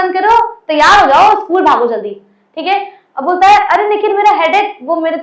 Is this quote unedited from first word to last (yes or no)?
yes